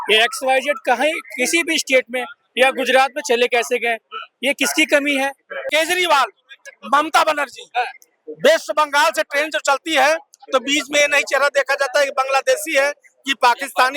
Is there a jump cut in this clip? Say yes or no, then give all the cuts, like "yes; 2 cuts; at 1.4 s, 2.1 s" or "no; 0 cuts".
yes; 1 cut; at 5.7 s